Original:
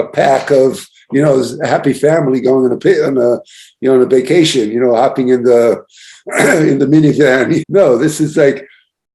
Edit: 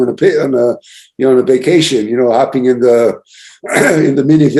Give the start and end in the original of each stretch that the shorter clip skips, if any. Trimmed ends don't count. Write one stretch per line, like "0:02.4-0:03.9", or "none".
none